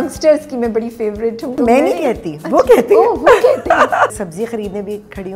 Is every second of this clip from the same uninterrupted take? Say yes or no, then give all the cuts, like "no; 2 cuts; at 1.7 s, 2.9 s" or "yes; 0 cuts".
no; 2 cuts; at 1.6 s, 4.1 s